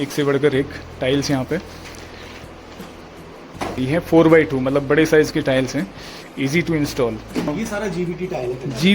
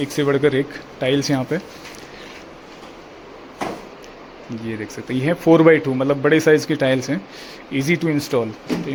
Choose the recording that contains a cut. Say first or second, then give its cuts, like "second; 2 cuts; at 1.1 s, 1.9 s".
first; 2 cuts; at 3.8 s, 7.5 s